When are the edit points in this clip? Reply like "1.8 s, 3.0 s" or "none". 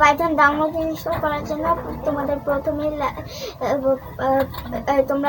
none